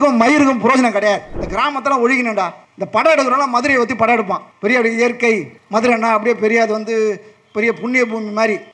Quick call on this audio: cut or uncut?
cut